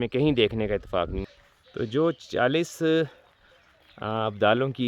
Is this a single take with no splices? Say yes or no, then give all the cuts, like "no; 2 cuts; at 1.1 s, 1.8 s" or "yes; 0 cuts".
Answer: no; 1 cut; at 1.2 s